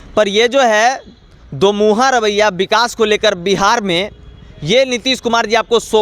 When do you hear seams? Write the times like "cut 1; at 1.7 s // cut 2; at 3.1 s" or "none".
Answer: none